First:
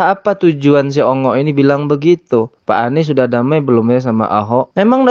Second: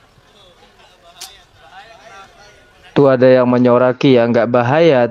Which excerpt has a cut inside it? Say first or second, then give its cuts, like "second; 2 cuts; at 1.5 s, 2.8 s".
second; 1 cut; at 2.9 s